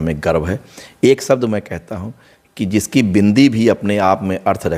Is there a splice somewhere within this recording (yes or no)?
no